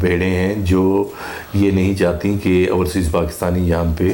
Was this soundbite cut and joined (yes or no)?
no